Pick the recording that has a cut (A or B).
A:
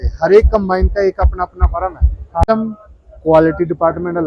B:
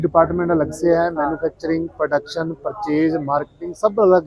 A